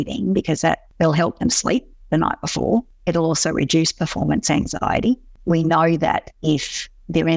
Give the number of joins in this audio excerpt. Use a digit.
3